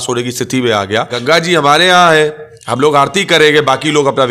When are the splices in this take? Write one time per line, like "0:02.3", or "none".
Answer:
0:01.1